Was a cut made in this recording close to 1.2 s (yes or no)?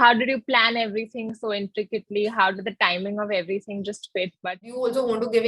no